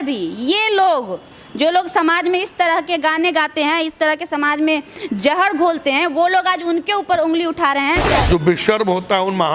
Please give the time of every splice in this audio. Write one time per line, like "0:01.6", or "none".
0:08.1